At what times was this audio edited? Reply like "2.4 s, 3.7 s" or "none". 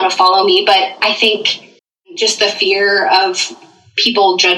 2.2 s